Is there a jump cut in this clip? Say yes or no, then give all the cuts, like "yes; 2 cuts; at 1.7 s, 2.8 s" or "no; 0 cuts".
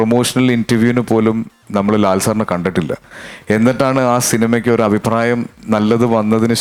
no; 0 cuts